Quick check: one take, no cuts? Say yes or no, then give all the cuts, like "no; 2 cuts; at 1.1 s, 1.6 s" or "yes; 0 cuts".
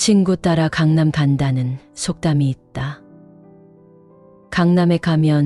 yes; 0 cuts